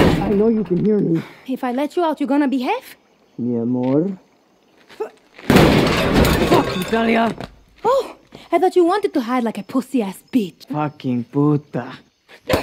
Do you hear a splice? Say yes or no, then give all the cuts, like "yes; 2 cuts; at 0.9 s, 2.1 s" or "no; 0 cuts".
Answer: yes; 1 cut; at 10.7 s